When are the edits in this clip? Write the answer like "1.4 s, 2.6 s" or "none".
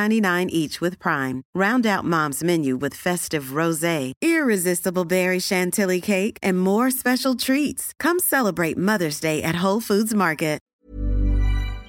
10.9 s